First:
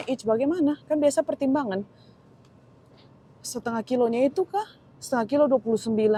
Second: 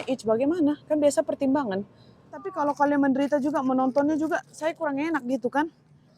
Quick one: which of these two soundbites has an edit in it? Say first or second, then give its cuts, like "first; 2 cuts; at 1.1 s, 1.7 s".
second; 1 cut; at 2.5 s